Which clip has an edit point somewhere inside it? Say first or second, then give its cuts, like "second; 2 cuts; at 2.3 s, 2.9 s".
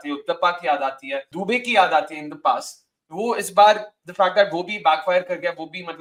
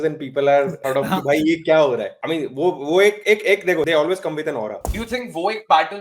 second; 1 cut; at 4.8 s